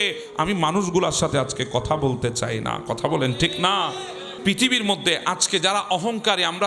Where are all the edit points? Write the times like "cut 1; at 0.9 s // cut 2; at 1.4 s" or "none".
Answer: cut 1; at 4.3 s

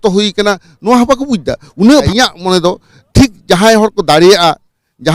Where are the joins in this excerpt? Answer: cut 1; at 2.1 s

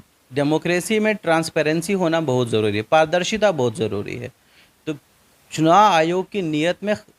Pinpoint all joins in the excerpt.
none

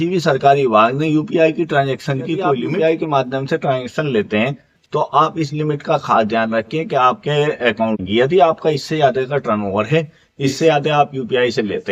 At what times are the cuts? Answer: cut 1; at 2.6 s // cut 2; at 8.0 s

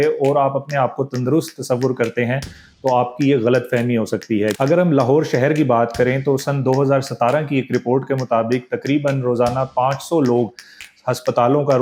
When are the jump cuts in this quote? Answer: cut 1; at 4.5 s

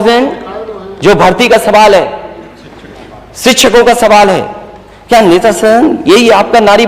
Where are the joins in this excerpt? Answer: none

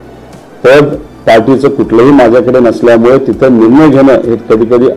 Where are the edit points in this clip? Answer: none

